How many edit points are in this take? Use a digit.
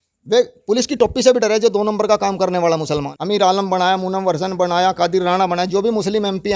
1